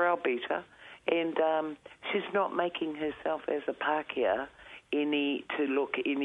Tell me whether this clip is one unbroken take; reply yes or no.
yes